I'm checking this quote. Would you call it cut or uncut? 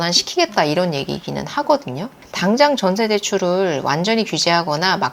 cut